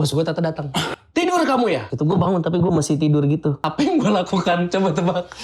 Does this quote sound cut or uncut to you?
cut